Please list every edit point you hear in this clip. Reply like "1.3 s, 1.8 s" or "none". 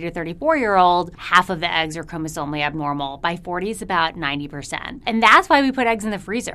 1.2 s, 5.0 s